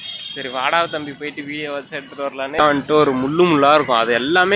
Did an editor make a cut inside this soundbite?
yes; 1 cut; at 2.6 s

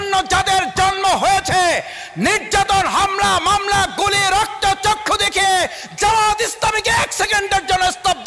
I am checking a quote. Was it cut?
no; 0 cuts

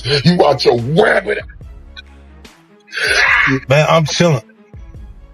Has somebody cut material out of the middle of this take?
yes; 1 cut; at 3.6 s

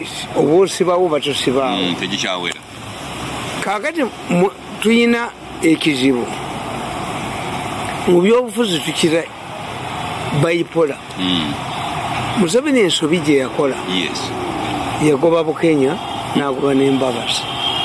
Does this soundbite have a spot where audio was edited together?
no; 0 cuts

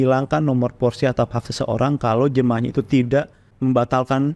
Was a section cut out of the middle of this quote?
yes; 1 cut; at 3.4 s

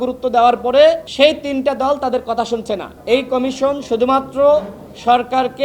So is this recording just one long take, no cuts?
no; 2 cuts; at 1.1 s, 2.9 s

